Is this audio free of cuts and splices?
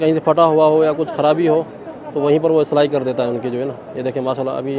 yes; 0 cuts

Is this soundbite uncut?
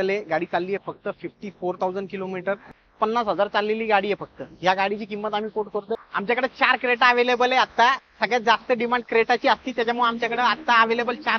no; 2 cuts; at 2.7 s, 6.0 s

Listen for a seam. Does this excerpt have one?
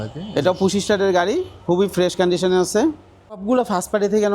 yes; 1 cut; at 3.4 s

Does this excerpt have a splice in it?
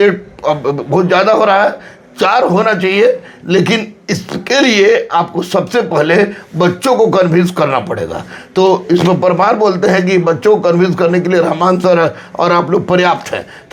no; 0 cuts

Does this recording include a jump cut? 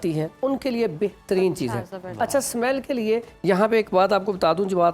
no; 0 cuts

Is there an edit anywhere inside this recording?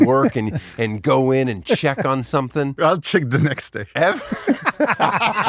yes; 1 cut; at 2.7 s

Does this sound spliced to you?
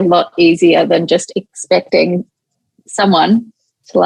no; 0 cuts

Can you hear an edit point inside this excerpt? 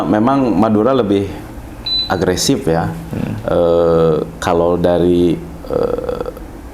no; 0 cuts

